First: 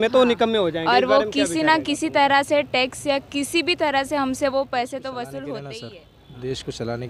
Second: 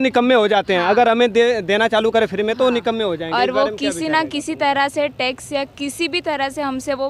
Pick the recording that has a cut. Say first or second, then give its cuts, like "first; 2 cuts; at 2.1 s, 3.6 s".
first; 1 cut; at 5.8 s